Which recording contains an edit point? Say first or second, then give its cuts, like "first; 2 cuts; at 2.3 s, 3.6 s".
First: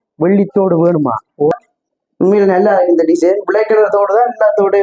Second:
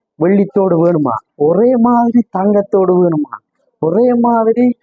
first; 1 cut; at 1.5 s